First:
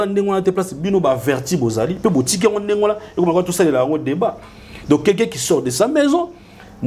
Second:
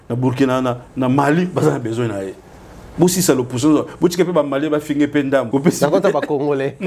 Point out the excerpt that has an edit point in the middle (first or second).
second